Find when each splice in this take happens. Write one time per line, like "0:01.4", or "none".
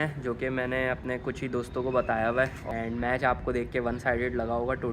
0:02.6